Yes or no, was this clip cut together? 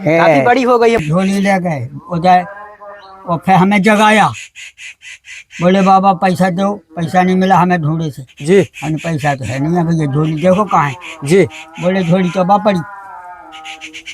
yes